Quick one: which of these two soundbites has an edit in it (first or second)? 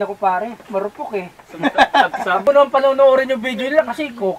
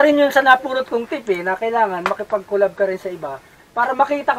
first